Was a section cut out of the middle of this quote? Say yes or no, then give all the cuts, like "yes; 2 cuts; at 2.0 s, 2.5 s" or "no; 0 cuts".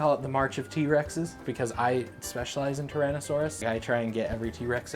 yes; 2 cuts; at 1.4 s, 3.6 s